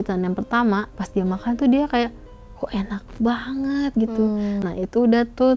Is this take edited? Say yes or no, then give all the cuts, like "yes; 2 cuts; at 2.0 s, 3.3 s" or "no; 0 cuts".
yes; 2 cuts; at 0.9 s, 4.6 s